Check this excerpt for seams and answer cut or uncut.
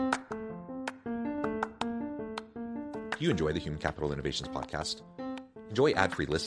uncut